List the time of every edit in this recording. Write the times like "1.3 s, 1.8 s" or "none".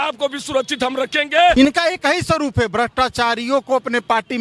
1.5 s